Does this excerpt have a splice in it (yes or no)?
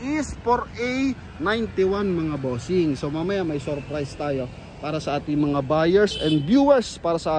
no